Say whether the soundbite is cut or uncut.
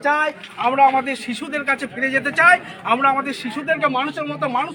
uncut